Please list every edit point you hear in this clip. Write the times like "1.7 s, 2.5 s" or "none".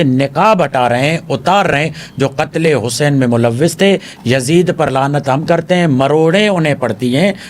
none